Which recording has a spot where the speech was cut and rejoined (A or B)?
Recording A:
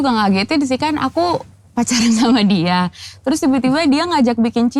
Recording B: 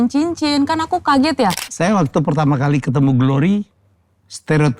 B